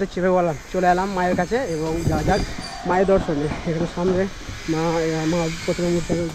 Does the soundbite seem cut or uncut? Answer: uncut